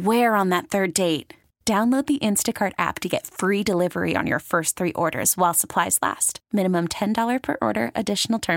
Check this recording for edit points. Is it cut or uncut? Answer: uncut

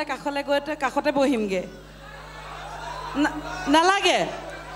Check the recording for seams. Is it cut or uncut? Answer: uncut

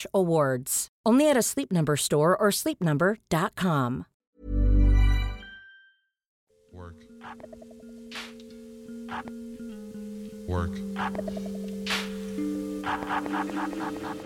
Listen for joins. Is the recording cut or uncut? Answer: uncut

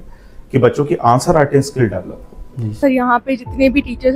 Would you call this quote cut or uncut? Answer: cut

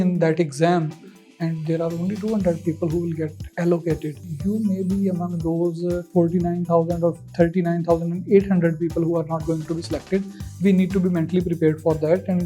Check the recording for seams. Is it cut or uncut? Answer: cut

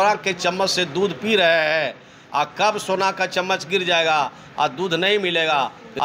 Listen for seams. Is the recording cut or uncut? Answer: uncut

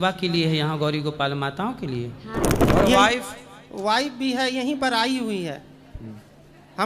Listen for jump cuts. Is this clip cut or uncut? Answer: cut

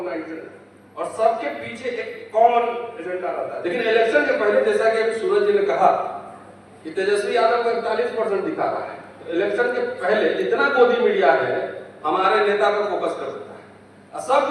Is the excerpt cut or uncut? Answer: cut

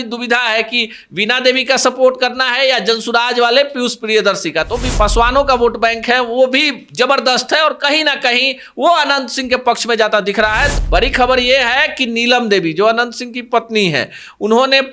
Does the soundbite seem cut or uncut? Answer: cut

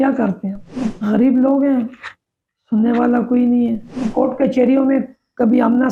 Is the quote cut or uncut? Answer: cut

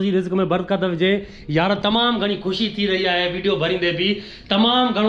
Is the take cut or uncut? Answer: uncut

